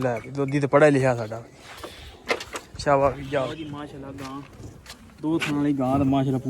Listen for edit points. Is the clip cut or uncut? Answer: cut